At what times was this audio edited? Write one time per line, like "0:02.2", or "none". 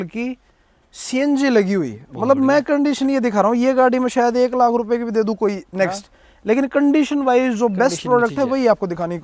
none